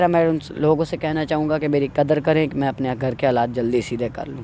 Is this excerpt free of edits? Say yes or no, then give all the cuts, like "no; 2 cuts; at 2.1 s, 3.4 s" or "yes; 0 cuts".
yes; 0 cuts